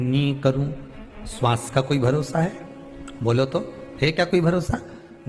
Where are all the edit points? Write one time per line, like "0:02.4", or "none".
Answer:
none